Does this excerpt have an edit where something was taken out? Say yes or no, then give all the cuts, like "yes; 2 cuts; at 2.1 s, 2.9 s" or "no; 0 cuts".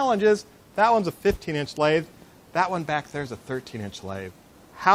yes; 1 cut; at 1.2 s